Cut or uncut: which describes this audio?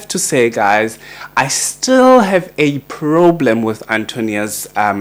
uncut